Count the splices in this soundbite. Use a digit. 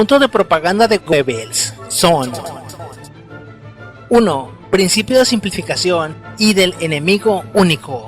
1